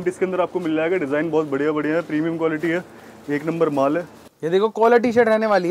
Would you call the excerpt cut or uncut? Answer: cut